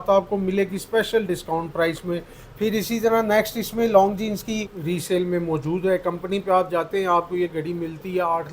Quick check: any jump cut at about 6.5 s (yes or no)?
no